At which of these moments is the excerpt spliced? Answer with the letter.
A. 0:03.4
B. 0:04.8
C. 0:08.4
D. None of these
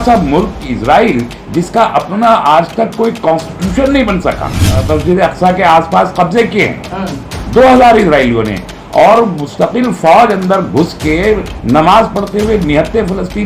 B